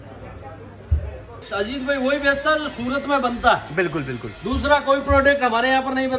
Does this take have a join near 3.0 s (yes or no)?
no